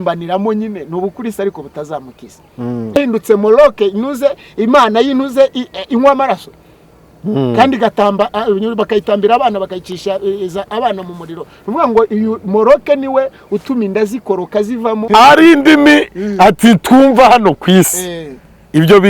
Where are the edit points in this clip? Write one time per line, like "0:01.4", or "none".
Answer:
0:03.0
0:15.0

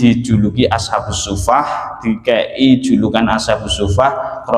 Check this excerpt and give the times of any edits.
none

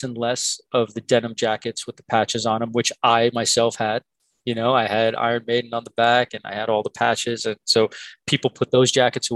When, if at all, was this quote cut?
none

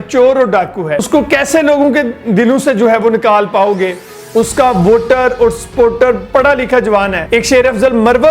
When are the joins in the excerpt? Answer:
0:01.0
0:07.2

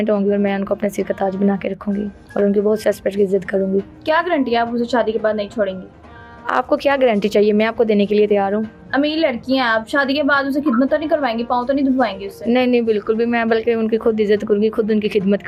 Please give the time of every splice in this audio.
none

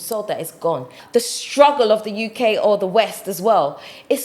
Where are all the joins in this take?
0:01.0

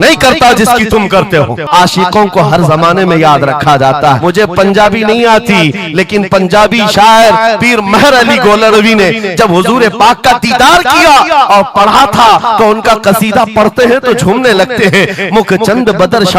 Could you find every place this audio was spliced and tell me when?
0:01.7
0:04.2

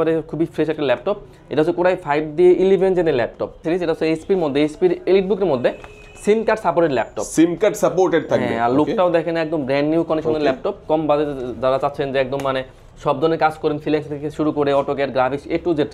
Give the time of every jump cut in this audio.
0:03.6
0:10.8

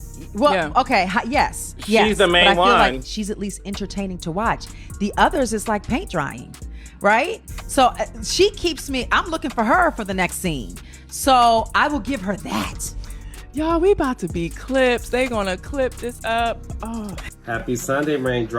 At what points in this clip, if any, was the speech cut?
0:17.2

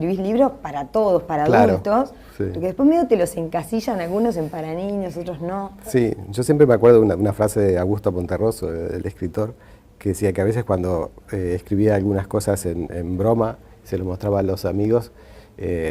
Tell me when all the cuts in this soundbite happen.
0:04.5

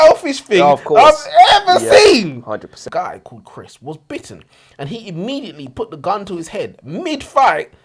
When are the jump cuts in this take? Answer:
0:02.8

